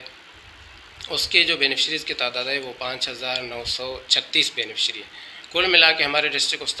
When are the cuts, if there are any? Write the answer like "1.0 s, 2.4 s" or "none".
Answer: none

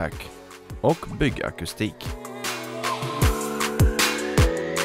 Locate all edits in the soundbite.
2.1 s

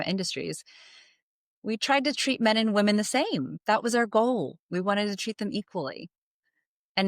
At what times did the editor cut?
3.5 s

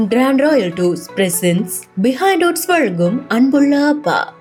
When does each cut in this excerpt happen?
none

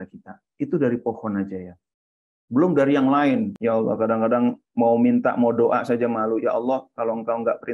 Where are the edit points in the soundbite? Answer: 3.5 s

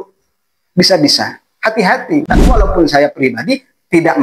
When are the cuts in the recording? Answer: 2.6 s

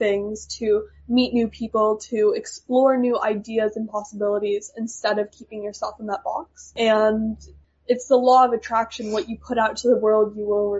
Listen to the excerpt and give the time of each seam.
6.7 s, 7.6 s

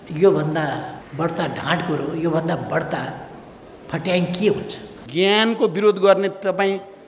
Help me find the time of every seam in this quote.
1.0 s, 5.0 s

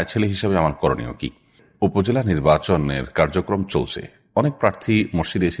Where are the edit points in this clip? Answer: 1.6 s

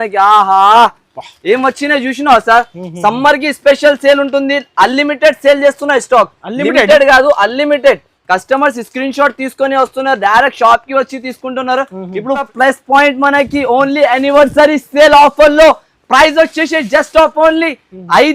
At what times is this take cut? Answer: 12.5 s

